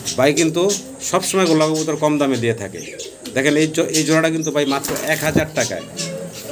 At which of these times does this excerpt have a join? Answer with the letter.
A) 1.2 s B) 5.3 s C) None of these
C